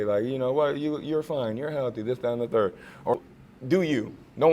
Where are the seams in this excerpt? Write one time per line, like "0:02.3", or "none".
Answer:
0:03.1